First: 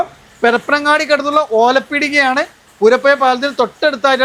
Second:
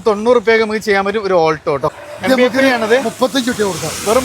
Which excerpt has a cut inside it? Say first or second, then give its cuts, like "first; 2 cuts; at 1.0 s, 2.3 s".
second; 1 cut; at 2.0 s